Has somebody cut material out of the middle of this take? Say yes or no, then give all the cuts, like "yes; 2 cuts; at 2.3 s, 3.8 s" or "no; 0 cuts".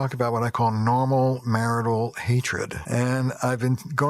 yes; 1 cut; at 2.8 s